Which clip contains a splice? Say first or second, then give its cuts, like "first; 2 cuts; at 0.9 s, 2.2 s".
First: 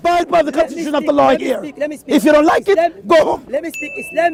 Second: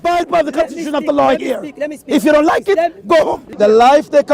second; 1 cut; at 3.4 s